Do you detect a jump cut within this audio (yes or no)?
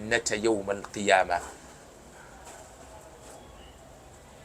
no